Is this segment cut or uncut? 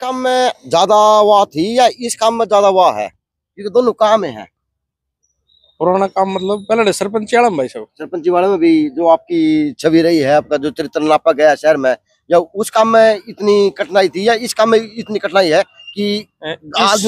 uncut